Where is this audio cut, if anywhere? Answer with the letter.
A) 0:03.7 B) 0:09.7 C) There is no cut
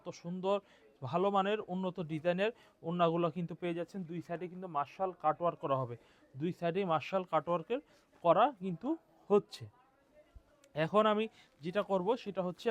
C